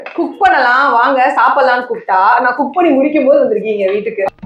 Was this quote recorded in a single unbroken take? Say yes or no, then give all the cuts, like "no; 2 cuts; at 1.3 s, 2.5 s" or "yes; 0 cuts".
yes; 0 cuts